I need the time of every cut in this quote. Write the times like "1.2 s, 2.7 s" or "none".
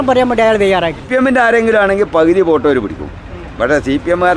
1.0 s